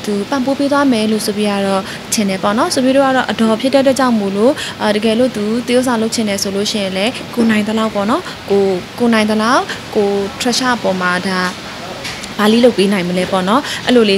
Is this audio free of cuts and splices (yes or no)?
yes